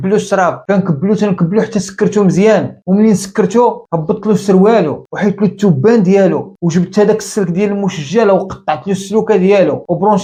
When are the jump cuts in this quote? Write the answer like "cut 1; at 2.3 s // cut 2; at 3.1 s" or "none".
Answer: none